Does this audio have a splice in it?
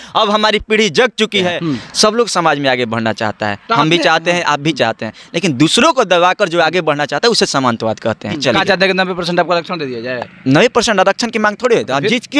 yes; 2 cuts; at 1.5 s, 8.4 s

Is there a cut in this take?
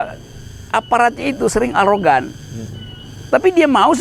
no; 0 cuts

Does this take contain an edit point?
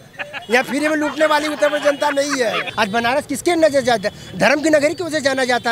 yes; 1 cut; at 2.6 s

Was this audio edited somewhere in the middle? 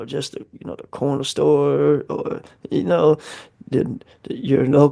no; 0 cuts

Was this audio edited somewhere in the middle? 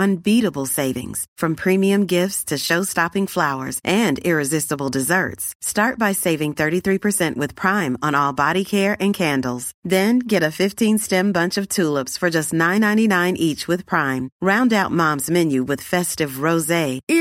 no; 0 cuts

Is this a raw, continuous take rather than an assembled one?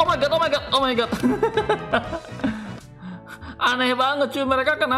no; 1 cut; at 2.8 s

